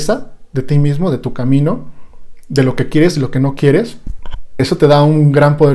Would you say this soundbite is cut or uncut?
cut